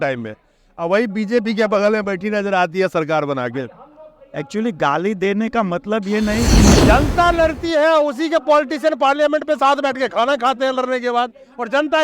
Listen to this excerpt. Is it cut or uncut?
cut